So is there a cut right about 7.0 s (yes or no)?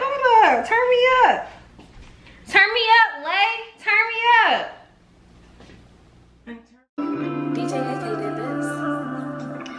yes